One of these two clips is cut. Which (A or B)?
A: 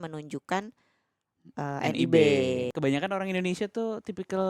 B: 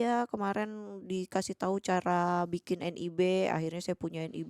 A